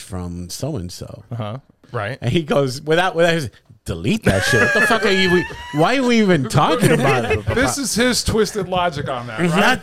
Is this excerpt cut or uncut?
cut